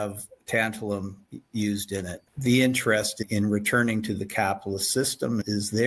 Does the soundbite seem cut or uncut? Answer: cut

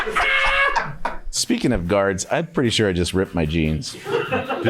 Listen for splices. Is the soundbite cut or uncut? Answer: cut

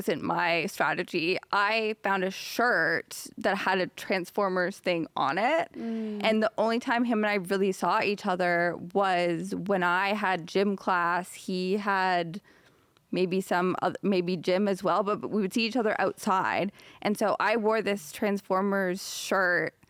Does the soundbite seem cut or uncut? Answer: uncut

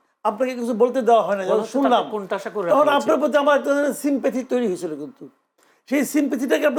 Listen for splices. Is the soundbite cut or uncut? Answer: uncut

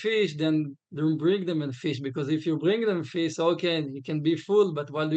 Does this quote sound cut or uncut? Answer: uncut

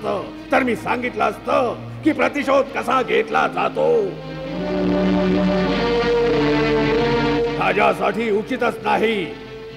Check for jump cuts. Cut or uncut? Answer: uncut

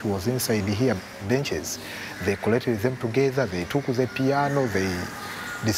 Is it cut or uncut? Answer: cut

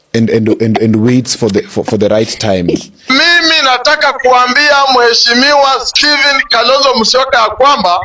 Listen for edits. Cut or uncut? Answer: cut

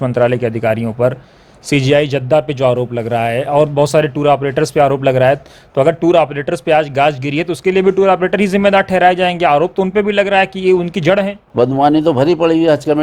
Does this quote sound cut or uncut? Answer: cut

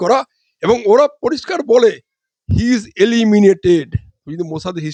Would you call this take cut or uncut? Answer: uncut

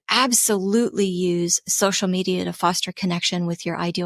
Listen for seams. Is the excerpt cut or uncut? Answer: uncut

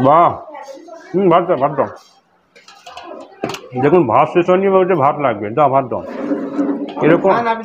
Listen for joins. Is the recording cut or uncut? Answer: uncut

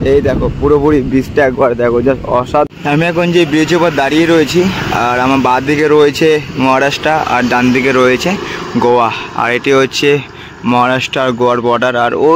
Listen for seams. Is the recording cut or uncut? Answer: cut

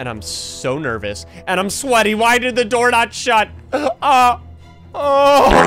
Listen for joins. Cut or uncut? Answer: uncut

